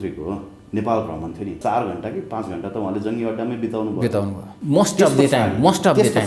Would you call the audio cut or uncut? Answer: cut